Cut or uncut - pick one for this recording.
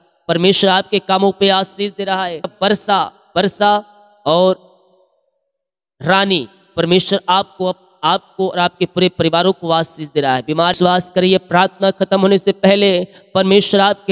cut